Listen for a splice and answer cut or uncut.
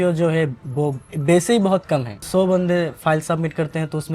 cut